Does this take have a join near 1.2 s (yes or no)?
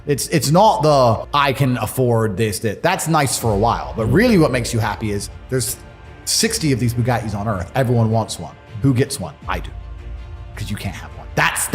yes